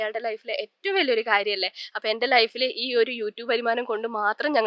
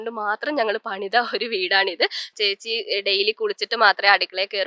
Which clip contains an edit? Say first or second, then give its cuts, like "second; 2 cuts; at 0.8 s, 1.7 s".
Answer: second; 1 cut; at 2.3 s